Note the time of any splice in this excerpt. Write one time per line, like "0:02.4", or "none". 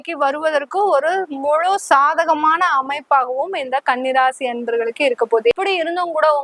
0:05.5

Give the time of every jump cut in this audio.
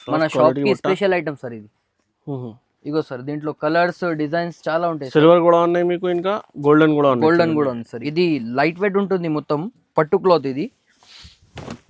0:07.9

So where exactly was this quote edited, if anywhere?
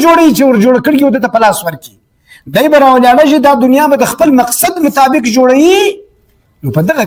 none

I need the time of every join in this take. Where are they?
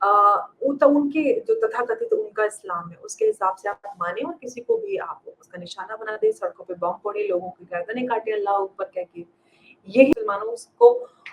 0:10.1

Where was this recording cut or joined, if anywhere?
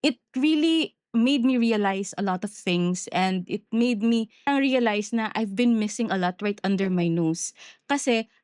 0:04.5

